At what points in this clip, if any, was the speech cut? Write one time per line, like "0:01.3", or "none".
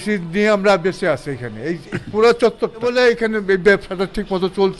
0:02.8